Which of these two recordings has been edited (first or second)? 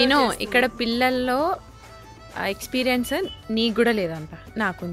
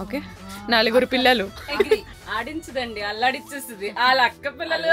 second